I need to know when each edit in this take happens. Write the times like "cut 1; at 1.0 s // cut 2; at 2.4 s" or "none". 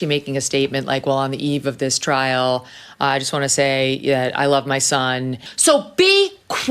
cut 1; at 5.5 s